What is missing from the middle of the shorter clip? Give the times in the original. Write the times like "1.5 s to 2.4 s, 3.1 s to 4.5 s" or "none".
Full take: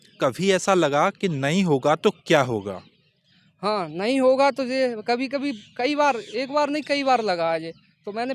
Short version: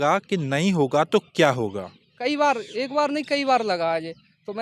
3.0 s to 5.7 s